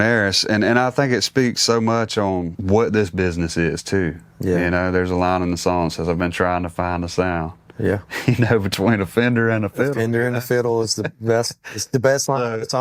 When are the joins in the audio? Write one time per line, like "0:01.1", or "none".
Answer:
0:02.5